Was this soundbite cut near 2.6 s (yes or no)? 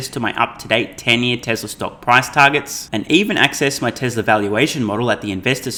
no